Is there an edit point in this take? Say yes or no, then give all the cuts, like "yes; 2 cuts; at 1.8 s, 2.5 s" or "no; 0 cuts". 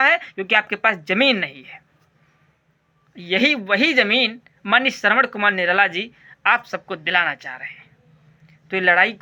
no; 0 cuts